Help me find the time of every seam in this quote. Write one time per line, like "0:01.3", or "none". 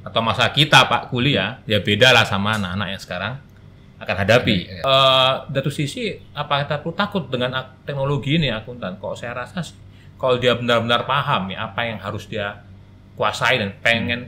0:04.7